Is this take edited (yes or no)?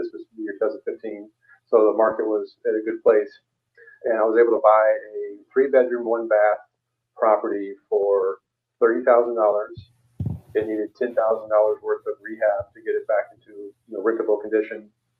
no